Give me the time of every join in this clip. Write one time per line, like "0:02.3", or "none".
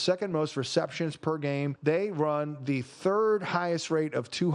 0:01.8